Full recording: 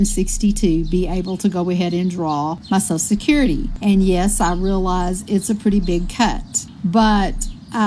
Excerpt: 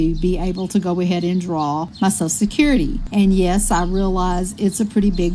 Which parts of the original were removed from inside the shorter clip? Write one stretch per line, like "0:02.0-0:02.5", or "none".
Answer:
none